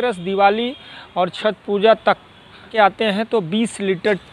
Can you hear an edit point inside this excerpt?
yes; 1 cut; at 2.7 s

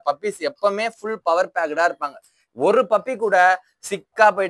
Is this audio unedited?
yes; 0 cuts

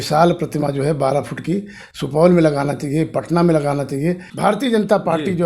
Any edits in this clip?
yes; 1 cut; at 4.3 s

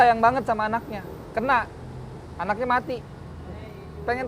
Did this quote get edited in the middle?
no; 0 cuts

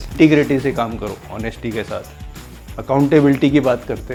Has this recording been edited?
no; 0 cuts

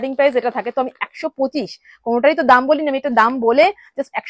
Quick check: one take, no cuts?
yes; 0 cuts

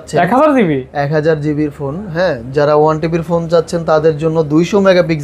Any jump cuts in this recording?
no; 0 cuts

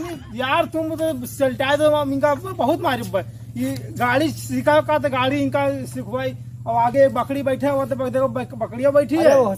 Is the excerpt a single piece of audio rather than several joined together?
yes; 0 cuts

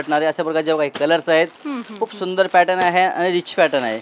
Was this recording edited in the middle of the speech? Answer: no; 0 cuts

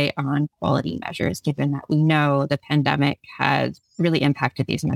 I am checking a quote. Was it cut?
no; 0 cuts

